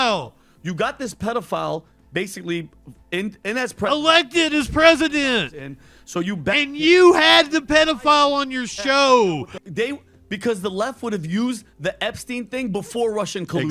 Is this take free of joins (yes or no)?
no